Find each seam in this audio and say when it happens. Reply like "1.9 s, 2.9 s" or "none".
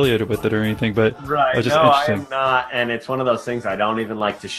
1.2 s